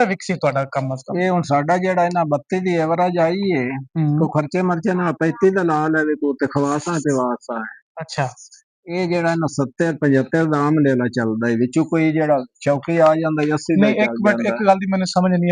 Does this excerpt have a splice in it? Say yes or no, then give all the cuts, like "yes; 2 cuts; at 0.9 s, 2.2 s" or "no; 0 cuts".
no; 0 cuts